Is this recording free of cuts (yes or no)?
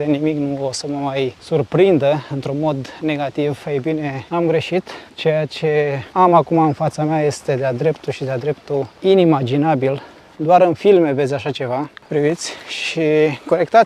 yes